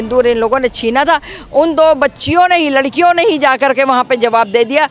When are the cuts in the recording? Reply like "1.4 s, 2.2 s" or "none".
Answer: none